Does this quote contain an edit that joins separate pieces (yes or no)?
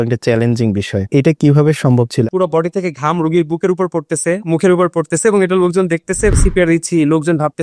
yes